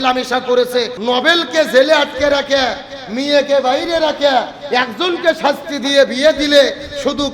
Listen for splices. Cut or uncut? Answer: cut